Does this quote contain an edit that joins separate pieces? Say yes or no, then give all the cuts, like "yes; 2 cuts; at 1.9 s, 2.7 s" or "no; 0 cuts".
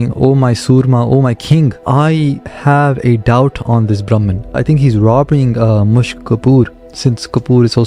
yes; 2 cuts; at 1.8 s, 4.6 s